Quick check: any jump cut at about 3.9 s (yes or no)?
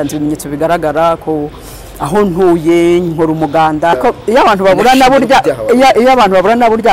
yes